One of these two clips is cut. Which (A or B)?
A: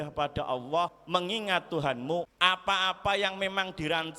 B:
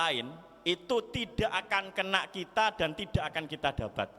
A